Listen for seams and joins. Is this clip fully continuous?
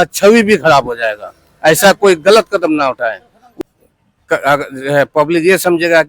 no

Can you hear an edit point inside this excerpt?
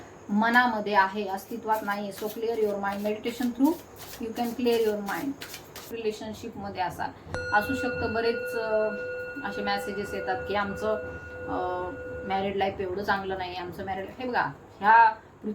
yes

